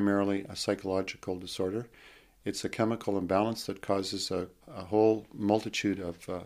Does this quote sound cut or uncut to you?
uncut